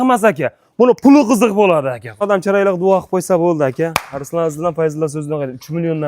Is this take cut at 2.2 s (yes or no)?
yes